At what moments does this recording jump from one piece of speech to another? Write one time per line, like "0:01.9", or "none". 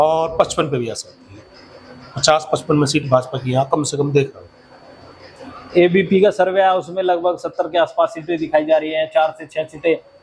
none